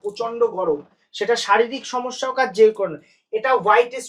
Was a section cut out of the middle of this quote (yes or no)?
no